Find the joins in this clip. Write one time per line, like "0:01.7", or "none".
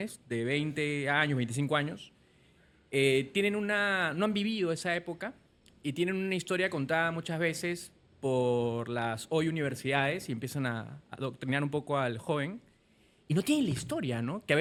none